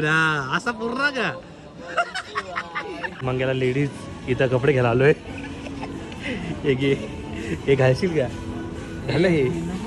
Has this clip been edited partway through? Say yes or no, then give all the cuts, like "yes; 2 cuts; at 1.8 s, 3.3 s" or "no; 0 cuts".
yes; 1 cut; at 3.2 s